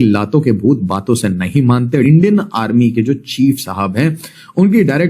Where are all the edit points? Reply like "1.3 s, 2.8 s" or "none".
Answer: 2.0 s